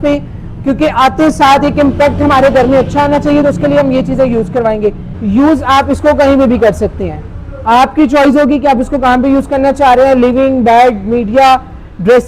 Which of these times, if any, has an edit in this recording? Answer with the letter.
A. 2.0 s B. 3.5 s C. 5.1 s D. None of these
C